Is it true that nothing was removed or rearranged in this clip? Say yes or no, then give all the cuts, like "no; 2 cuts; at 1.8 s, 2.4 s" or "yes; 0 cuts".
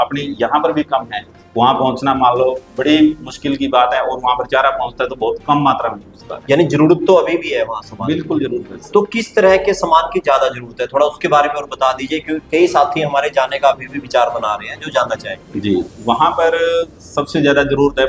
yes; 0 cuts